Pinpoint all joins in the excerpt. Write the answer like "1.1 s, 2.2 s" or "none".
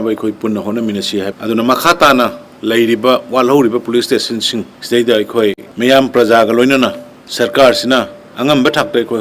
1.3 s